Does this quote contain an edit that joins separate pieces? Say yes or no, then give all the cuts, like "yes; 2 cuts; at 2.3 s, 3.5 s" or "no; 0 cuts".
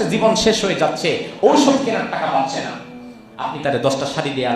no; 0 cuts